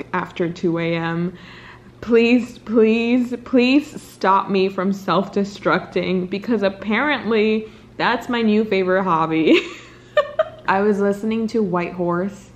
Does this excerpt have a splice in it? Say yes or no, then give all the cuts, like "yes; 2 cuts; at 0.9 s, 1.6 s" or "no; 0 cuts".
no; 0 cuts